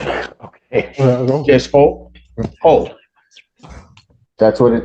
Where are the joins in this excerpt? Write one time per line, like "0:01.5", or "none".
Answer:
none